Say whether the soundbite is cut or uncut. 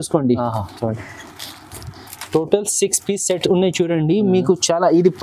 uncut